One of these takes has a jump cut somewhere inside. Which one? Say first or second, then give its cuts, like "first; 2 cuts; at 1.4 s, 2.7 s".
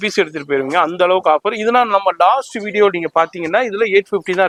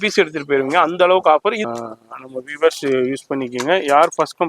second; 1 cut; at 1.6 s